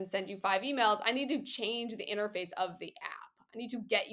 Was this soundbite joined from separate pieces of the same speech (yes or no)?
no